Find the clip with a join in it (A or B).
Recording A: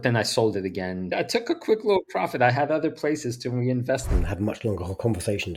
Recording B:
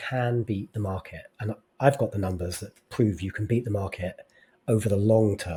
A